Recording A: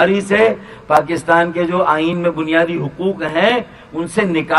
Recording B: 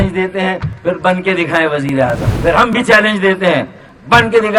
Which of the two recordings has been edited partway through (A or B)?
B